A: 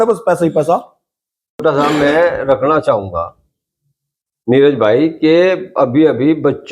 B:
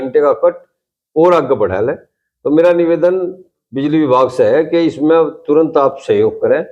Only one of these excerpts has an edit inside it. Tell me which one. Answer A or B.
A